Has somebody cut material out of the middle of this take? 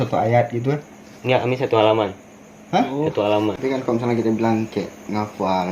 yes; 1 cut; at 3.6 s

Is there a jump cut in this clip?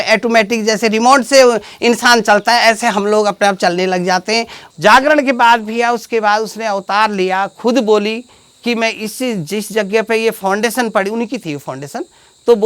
yes; 1 cut; at 4.6 s

